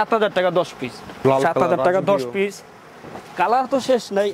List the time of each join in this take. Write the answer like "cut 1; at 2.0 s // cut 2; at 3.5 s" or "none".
cut 1; at 1.2 s